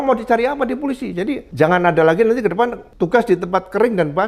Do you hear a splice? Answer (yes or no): yes